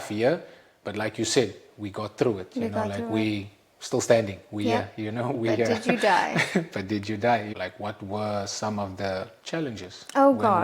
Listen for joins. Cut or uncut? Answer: cut